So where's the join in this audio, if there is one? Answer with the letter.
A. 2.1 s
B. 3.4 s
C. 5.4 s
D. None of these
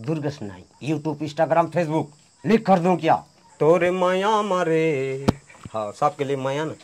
B